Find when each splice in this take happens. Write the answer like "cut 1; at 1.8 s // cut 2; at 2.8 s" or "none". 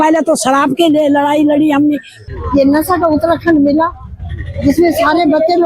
cut 1; at 2.2 s

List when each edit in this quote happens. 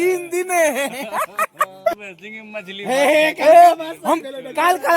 cut 1; at 1.9 s

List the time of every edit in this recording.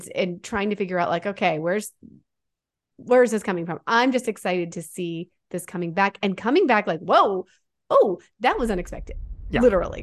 none

